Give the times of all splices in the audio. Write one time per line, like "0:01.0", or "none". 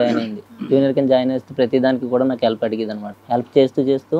0:03.0